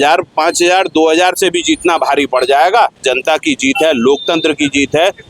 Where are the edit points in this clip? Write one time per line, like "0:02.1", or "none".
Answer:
0:03.0